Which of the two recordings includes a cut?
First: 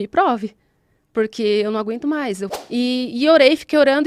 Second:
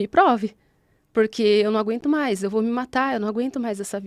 first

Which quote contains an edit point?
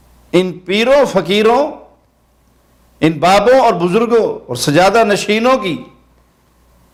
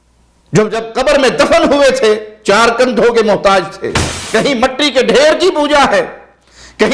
second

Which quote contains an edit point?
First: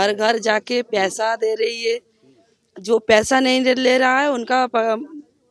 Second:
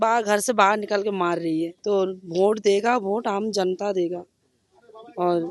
second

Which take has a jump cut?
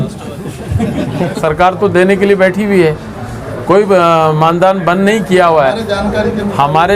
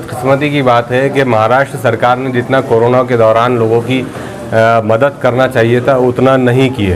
first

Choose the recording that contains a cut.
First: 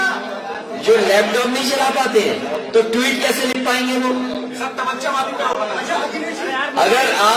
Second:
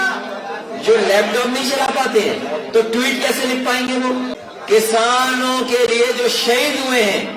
second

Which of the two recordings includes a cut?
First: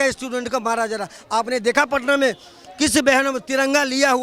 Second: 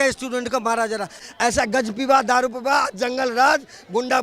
second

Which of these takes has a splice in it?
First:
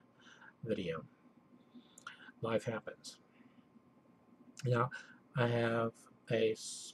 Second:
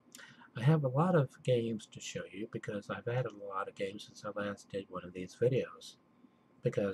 first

